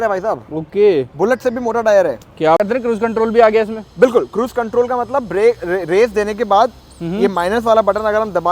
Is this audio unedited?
no; 1 cut; at 2.6 s

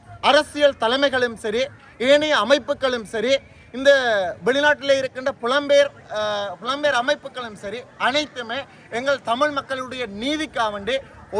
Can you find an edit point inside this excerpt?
no; 0 cuts

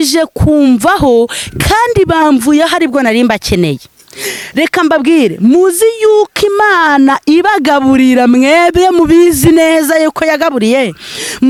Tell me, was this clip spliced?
no; 0 cuts

